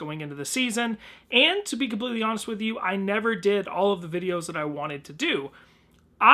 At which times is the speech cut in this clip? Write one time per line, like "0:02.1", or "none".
none